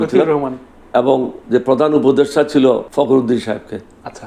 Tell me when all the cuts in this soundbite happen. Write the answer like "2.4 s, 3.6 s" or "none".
1.4 s, 2.9 s